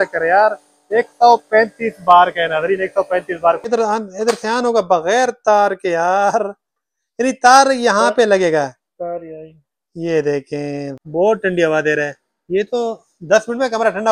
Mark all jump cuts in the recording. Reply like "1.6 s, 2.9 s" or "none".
3.6 s, 10.8 s